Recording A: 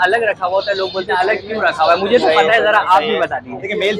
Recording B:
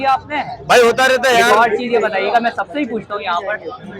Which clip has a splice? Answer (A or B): B